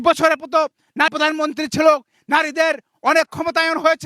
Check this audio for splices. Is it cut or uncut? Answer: cut